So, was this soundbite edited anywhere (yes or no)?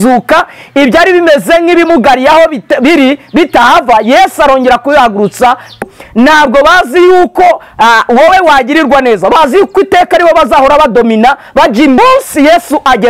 yes